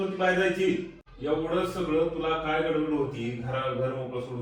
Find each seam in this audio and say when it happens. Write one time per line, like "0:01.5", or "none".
none